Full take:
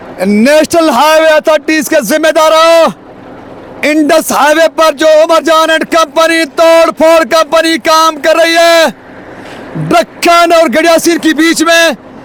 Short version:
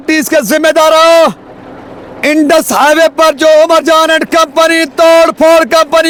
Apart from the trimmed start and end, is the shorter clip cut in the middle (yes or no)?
no